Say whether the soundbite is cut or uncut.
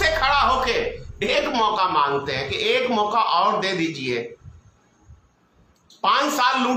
uncut